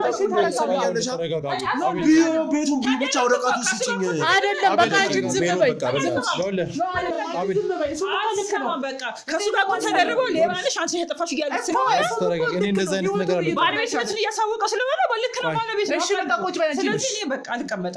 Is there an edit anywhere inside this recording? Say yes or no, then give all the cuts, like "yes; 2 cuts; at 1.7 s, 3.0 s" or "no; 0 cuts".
no; 0 cuts